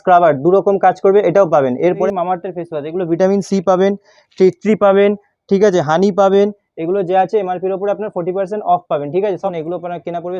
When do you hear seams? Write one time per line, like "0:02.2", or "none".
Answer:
0:02.0
0:09.5